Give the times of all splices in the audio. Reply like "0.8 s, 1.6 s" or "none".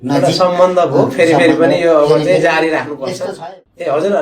3.3 s